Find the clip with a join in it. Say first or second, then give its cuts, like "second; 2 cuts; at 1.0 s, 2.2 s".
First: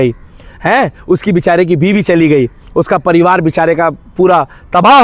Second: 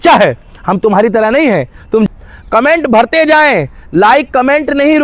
second; 1 cut; at 2.1 s